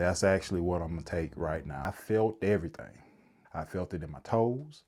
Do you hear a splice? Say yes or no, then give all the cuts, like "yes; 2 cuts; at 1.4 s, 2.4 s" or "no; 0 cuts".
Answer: yes; 1 cut; at 1.9 s